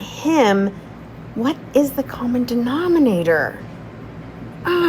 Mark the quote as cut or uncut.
uncut